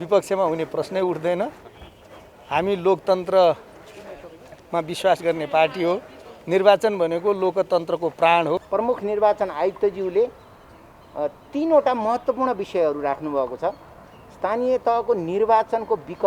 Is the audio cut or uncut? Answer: cut